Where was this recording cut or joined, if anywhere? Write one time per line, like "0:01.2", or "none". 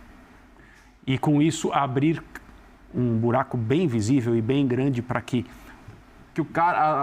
0:05.8